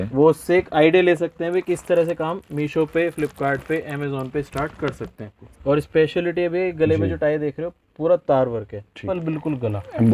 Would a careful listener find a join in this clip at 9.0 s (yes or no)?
yes